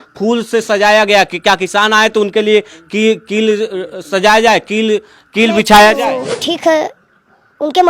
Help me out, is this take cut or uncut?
cut